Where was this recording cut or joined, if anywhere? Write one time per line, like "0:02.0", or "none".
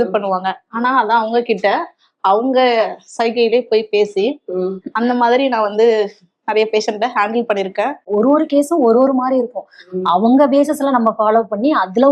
0:08.0